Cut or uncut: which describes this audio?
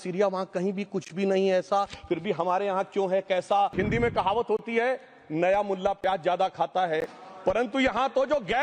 cut